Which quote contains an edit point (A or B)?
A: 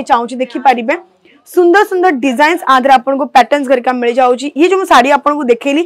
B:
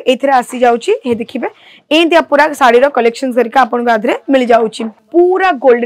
B